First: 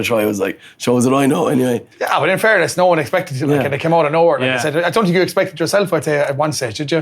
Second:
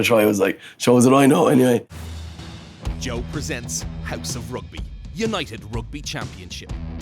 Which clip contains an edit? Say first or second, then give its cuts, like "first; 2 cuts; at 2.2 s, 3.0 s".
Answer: second; 1 cut; at 1.9 s